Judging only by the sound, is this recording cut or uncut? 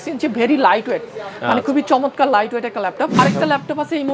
cut